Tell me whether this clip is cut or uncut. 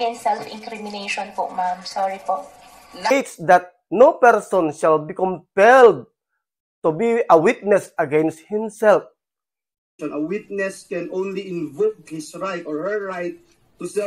cut